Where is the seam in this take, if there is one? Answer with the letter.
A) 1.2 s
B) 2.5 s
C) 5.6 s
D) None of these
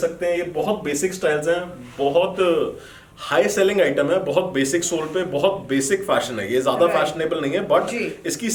D